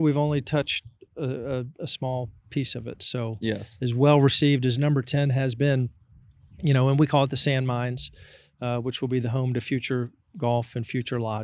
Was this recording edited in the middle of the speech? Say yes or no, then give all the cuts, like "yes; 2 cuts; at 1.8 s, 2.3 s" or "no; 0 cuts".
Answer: no; 0 cuts